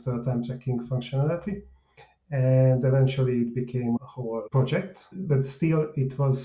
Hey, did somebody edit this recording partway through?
yes; 2 cuts; at 4.0 s, 5.1 s

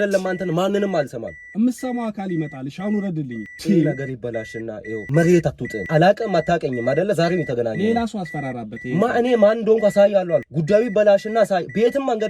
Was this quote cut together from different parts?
yes; 4 cuts; at 3.5 s, 5.0 s, 5.8 s, 10.5 s

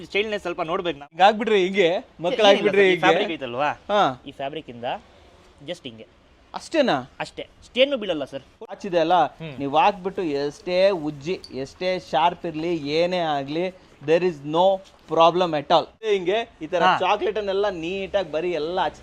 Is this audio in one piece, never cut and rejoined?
no; 3 cuts; at 1.1 s, 8.8 s, 16.1 s

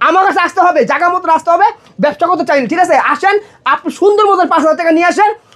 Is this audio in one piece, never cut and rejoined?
yes; 0 cuts

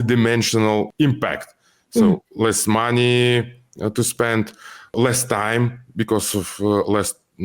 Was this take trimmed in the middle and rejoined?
yes; 2 cuts; at 0.9 s, 4.9 s

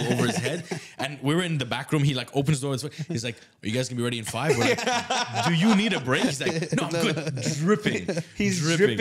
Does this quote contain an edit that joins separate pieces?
no; 0 cuts

